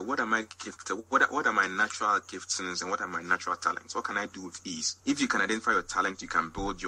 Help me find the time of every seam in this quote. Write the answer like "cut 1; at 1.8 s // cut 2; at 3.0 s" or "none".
none